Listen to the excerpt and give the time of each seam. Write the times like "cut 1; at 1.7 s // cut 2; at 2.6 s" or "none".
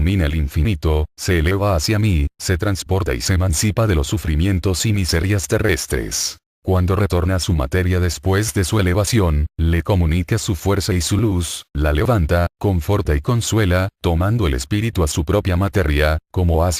cut 1; at 6.5 s